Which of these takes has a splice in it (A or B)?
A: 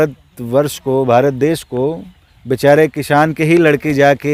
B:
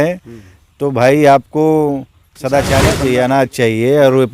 B